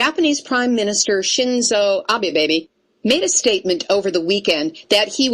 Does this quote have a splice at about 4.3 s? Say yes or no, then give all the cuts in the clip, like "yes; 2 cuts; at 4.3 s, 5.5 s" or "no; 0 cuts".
no; 1 cut; at 1.3 s